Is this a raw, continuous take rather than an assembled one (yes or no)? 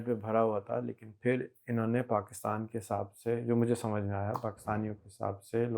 yes